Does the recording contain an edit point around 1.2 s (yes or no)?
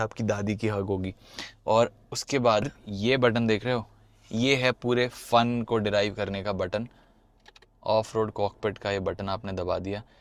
no